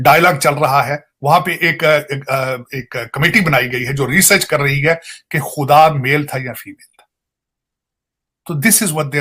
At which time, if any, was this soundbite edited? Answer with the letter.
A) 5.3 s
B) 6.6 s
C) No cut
C